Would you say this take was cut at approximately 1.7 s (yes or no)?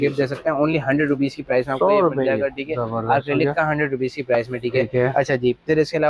no